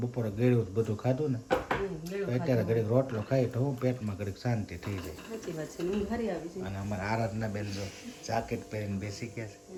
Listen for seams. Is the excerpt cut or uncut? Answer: uncut